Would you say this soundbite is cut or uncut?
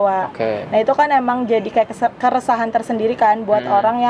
uncut